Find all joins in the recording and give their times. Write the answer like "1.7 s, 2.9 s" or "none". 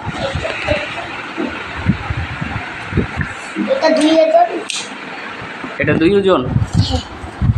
none